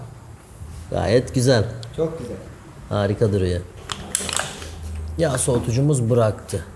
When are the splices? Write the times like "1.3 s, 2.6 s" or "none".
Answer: 3.8 s